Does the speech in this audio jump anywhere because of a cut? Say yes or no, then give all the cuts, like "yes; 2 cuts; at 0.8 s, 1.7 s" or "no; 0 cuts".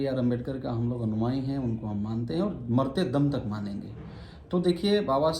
no; 0 cuts